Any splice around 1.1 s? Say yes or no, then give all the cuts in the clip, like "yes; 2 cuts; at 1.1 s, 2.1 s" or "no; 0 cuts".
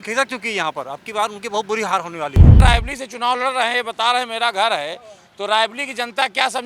no; 1 cut; at 2.6 s